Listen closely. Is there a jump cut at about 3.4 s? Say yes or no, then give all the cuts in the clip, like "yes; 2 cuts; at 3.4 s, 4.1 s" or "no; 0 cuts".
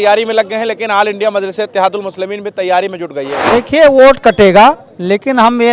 yes; 1 cut; at 3.4 s